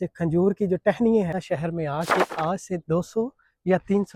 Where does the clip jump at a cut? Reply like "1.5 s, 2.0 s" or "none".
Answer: 1.4 s